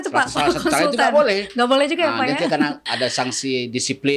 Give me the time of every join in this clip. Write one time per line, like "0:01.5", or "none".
0:02.9